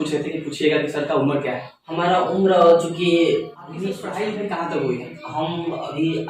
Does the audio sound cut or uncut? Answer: cut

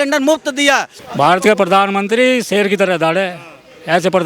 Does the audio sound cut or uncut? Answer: cut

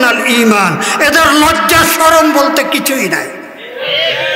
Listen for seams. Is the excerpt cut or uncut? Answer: uncut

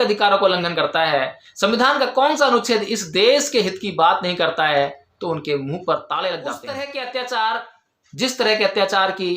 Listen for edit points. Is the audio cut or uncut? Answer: cut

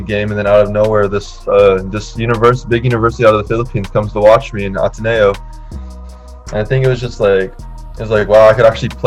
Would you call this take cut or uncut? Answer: uncut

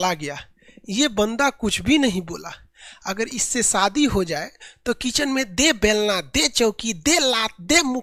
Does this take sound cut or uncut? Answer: uncut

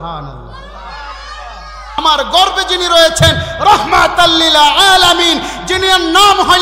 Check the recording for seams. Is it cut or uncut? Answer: cut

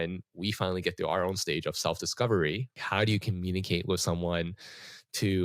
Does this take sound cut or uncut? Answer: cut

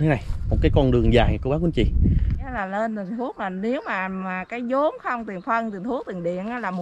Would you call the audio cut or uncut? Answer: cut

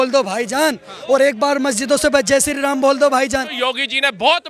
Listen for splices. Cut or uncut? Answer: cut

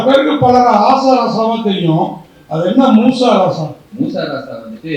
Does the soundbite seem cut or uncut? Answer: cut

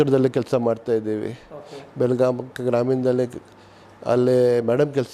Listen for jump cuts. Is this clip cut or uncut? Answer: uncut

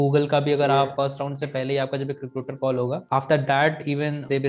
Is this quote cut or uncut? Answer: uncut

